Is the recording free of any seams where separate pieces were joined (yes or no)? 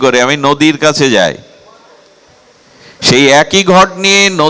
yes